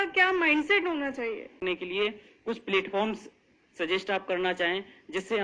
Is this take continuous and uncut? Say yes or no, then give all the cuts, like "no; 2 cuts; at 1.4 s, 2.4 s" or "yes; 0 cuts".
no; 1 cut; at 1.6 s